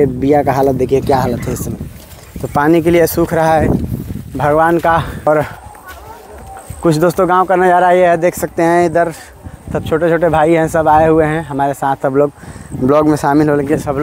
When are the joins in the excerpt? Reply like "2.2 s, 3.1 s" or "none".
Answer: 5.3 s